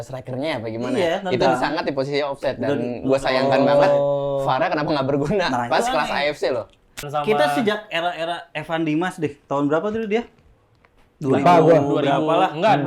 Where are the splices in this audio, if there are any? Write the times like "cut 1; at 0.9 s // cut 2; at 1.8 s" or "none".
cut 1; at 7.1 s

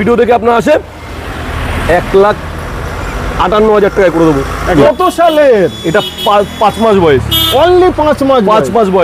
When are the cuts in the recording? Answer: cut 1; at 4.8 s

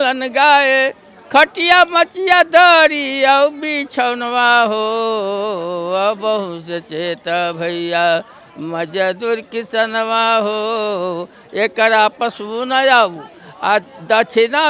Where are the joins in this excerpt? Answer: none

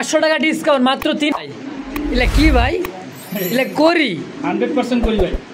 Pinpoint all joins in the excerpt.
cut 1; at 1.3 s

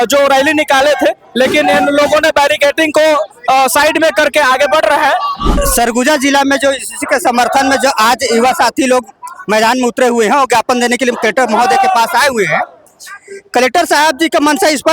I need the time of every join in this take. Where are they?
cut 1; at 5.5 s

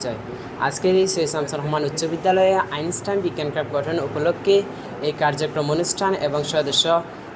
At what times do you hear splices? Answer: none

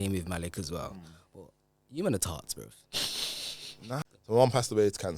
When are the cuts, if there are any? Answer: cut 1; at 4.0 s

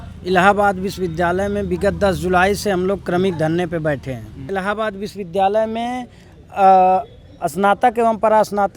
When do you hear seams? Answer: cut 1; at 4.4 s

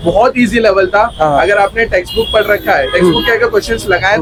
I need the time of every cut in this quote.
none

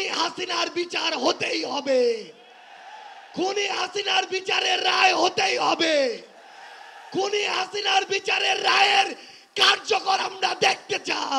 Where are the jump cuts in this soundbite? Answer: none

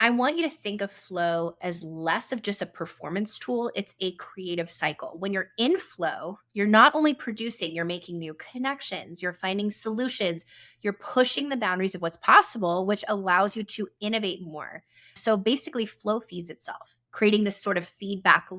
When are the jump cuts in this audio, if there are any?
none

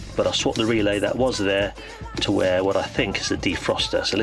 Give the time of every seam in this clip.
none

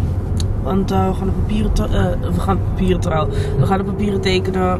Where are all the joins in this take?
none

